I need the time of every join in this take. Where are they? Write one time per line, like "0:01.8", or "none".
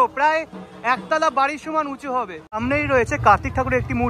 0:02.4